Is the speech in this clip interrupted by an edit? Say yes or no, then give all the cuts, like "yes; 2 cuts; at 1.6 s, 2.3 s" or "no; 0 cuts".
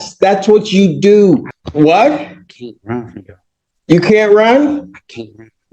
yes; 1 cut; at 1.6 s